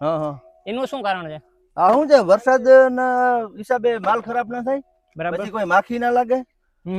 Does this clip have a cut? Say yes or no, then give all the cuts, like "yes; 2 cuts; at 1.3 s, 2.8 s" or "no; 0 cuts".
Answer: no; 0 cuts